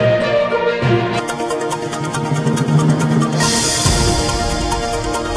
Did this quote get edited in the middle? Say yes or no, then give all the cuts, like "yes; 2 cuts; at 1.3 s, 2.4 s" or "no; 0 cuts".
no; 0 cuts